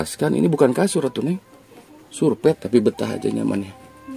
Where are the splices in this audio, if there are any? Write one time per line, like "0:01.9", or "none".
0:02.6